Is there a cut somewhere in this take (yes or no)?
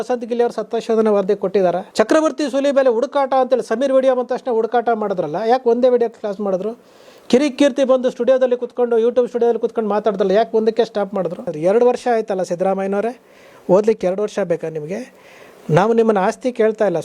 yes